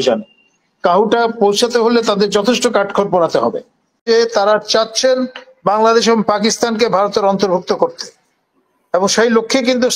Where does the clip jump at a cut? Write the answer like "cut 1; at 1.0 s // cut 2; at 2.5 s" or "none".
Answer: cut 1; at 4.1 s